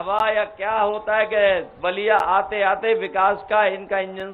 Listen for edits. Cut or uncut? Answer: uncut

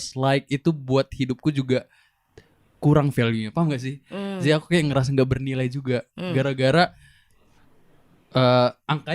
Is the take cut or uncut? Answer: uncut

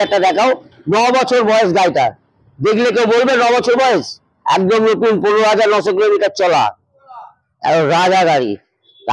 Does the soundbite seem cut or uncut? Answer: uncut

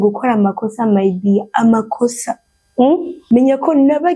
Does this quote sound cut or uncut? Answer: cut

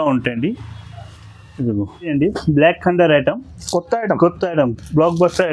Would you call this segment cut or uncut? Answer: cut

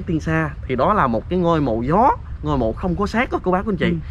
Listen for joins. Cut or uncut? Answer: uncut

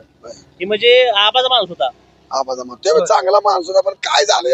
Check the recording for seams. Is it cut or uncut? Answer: uncut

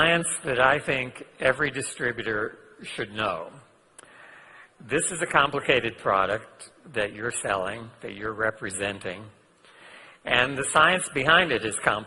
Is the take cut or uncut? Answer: cut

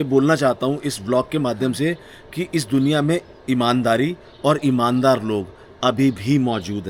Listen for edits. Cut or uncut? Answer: uncut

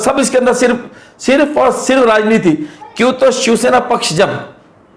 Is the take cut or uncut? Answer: uncut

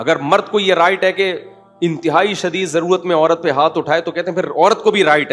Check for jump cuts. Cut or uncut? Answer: uncut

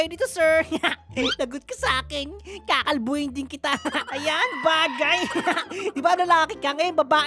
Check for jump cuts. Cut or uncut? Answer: cut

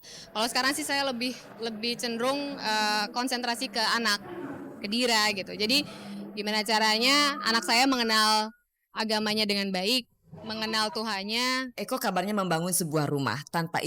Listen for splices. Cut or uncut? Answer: cut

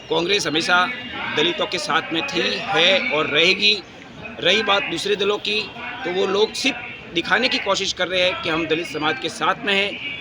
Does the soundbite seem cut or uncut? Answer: uncut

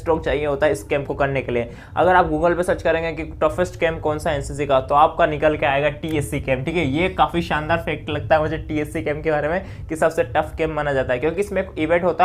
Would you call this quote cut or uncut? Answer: uncut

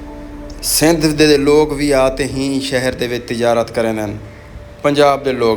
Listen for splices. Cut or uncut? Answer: uncut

